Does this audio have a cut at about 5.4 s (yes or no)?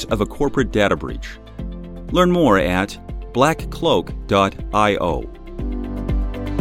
yes